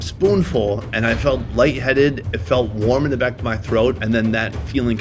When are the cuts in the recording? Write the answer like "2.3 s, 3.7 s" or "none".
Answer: 4.0 s